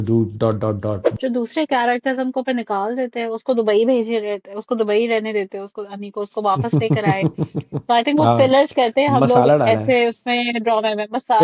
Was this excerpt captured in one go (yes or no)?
no